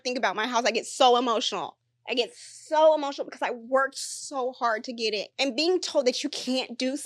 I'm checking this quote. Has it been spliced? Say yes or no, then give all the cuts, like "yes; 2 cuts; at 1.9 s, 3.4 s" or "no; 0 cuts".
yes; 1 cut; at 5.3 s